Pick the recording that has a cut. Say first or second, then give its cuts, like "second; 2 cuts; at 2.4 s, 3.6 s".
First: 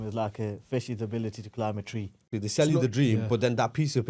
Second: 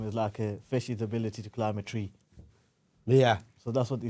first; 1 cut; at 2.4 s